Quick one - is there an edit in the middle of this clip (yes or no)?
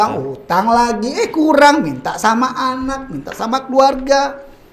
no